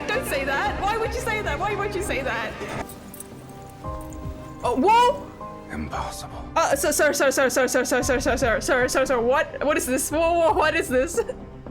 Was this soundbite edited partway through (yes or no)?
yes